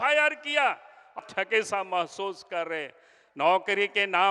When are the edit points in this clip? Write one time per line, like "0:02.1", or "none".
0:01.2

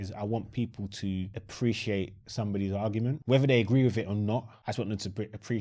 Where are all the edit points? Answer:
0:01.4
0:03.2
0:04.5

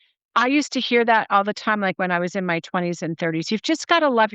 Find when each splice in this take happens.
none

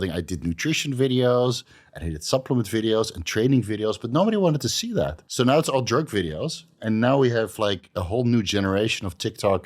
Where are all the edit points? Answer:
0:05.2
0:06.8

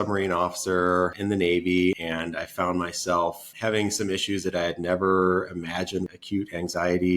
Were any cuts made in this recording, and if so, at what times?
0:01.2
0:02.0
0:03.5
0:06.1

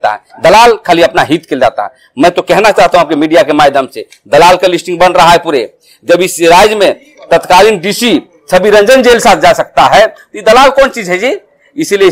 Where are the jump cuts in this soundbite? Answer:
none

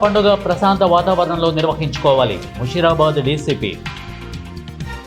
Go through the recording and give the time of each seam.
0:03.8

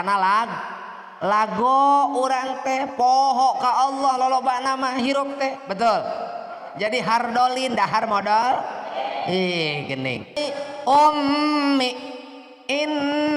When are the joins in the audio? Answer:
0:10.4

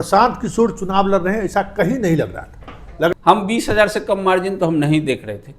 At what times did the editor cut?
0:03.1

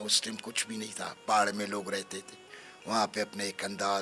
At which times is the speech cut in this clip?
none

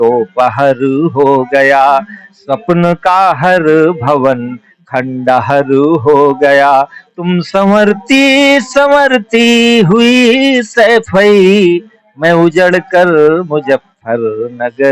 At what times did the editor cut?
none

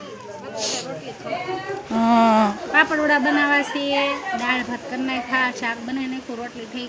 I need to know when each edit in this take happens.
none

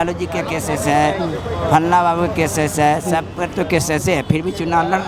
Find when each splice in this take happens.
none

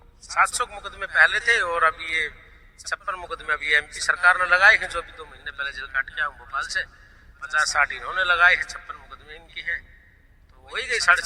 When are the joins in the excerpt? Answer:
none

